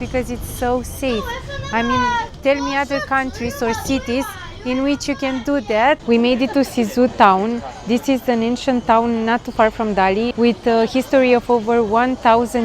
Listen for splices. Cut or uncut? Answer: cut